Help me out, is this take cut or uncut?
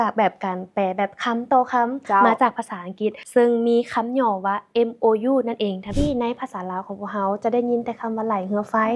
cut